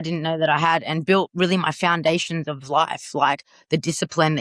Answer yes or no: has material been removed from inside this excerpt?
no